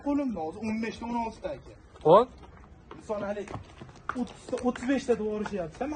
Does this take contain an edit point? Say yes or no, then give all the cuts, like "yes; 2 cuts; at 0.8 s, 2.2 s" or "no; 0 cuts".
no; 0 cuts